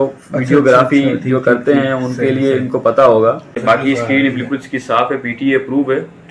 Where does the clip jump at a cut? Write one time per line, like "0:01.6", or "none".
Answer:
0:03.5